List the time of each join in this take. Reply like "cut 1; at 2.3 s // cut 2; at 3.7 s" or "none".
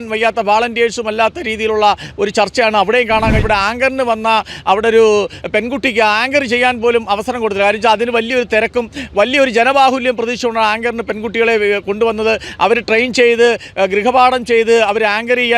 cut 1; at 3.4 s

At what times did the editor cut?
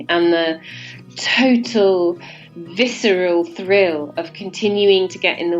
none

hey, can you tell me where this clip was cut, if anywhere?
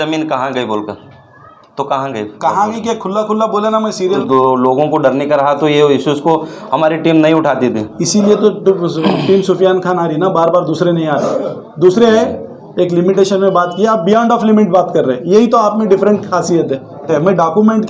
cut 1; at 4.2 s // cut 2; at 17.0 s

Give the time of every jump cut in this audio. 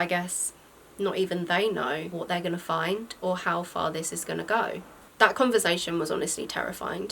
none

